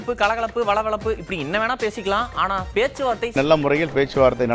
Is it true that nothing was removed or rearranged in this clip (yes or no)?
no